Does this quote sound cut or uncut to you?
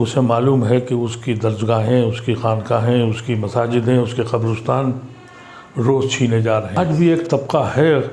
cut